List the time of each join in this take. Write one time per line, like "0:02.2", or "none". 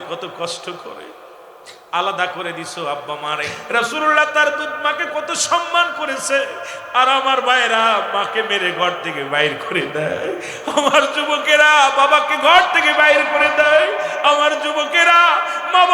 0:03.6

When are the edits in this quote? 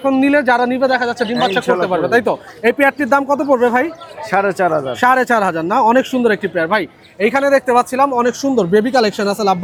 none

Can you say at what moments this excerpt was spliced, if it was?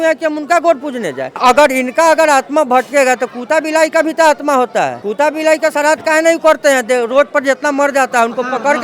0:01.4
0:05.0

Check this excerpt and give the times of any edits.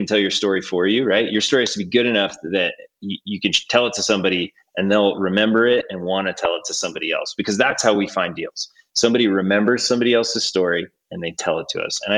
none

